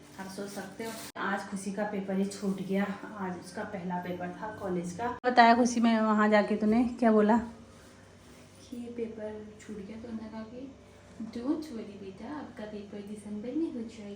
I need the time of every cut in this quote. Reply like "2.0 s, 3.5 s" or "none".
1.2 s, 5.2 s